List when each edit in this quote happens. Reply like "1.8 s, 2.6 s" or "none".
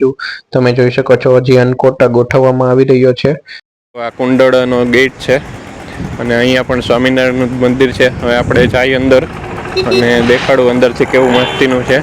4.0 s